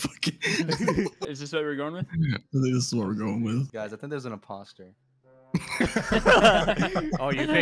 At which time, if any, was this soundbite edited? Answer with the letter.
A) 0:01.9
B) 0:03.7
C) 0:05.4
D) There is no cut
B